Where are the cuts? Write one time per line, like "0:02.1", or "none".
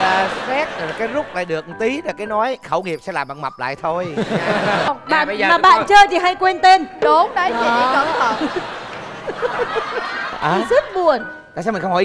0:04.9